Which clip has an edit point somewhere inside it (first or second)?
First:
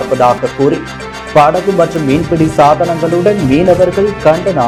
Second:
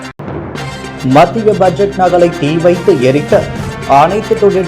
second